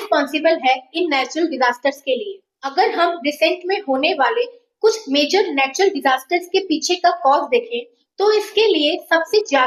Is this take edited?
no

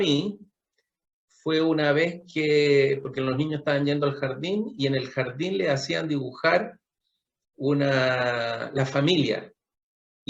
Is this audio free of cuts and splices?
yes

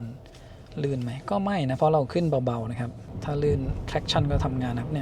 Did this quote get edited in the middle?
yes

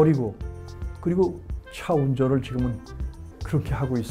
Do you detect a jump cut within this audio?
no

